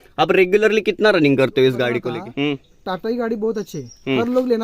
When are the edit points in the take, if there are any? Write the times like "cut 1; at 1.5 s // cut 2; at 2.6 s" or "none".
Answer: cut 1; at 2.1 s